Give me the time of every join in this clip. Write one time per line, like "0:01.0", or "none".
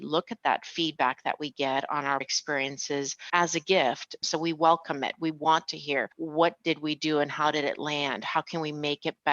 0:02.3
0:04.1
0:06.2